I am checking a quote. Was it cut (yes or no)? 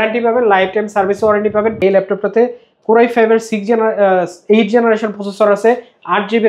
yes